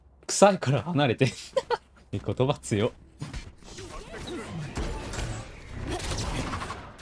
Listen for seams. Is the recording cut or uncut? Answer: uncut